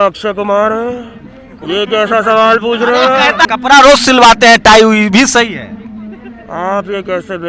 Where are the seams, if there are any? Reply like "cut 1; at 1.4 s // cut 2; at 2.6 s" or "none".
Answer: cut 1; at 3.4 s